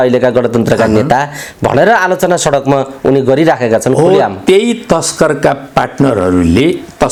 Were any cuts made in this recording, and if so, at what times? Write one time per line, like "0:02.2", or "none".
none